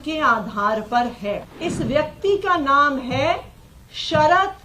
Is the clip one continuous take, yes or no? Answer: no